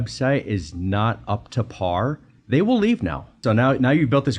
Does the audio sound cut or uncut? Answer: cut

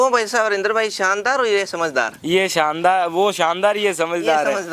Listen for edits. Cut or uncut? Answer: uncut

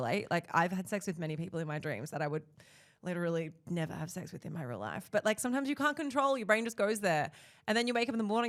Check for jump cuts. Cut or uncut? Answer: uncut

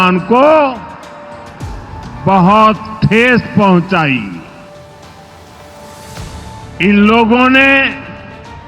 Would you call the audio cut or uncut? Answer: uncut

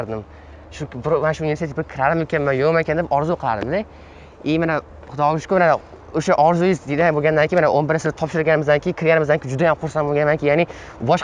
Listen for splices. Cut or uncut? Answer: uncut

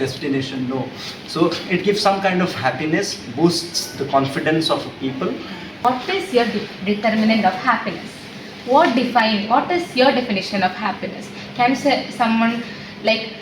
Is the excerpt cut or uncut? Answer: cut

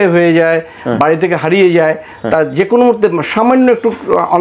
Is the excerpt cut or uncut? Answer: uncut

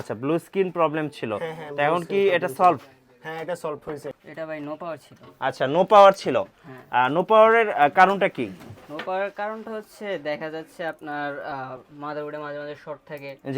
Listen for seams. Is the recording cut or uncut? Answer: cut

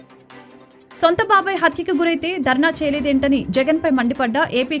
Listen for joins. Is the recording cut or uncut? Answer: cut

